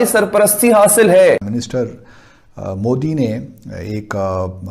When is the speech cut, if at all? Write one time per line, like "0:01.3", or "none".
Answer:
0:01.5